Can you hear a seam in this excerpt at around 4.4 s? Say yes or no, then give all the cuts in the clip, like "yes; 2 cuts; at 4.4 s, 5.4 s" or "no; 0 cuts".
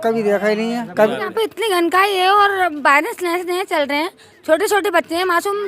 no; 1 cut; at 1.3 s